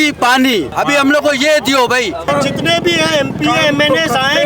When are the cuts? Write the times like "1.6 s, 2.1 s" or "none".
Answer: none

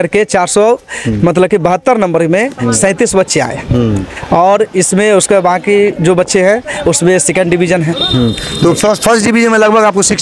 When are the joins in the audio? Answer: none

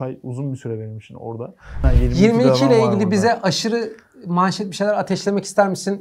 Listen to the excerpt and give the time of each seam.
1.9 s

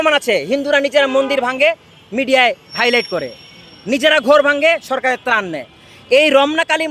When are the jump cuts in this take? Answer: none

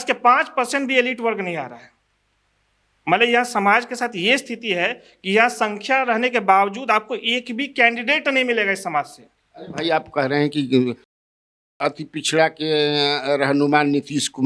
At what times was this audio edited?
none

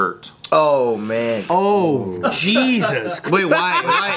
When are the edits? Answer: 1.4 s, 3.2 s

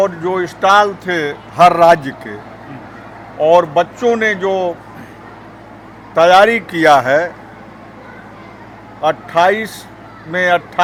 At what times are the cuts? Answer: none

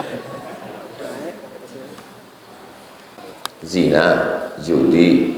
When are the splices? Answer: 3.2 s

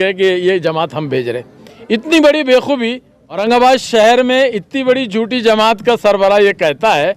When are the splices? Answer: 3.4 s

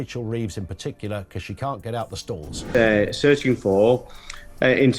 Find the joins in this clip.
2.5 s

